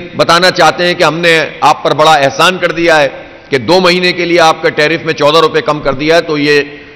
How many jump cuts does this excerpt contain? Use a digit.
0